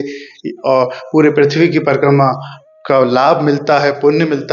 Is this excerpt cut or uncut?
uncut